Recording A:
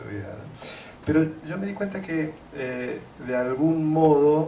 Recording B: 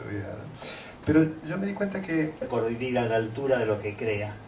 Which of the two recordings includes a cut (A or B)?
A